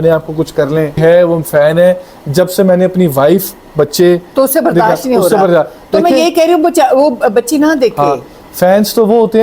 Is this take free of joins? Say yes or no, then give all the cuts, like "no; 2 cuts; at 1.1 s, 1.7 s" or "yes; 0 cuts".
no; 1 cut; at 1.0 s